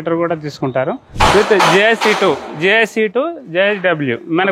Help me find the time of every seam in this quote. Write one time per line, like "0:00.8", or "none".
0:01.0